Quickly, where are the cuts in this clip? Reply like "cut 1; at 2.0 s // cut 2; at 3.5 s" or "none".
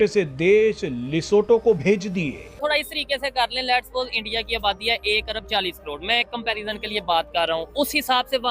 cut 1; at 2.6 s